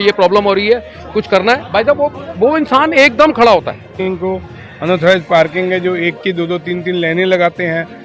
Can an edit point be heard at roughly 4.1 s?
yes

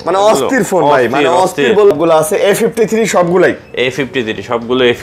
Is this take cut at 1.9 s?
yes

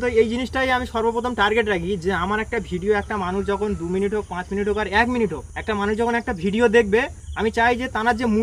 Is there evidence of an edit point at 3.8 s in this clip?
no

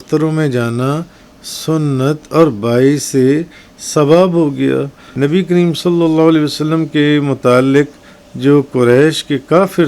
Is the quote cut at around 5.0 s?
yes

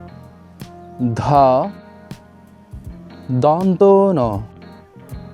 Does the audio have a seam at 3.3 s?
yes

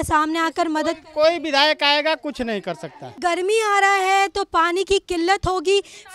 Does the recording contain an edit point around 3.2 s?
yes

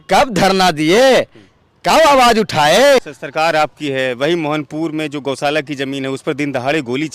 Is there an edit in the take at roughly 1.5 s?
no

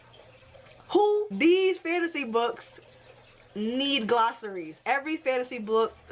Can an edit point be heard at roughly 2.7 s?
no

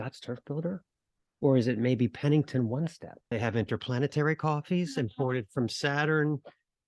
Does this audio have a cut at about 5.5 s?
no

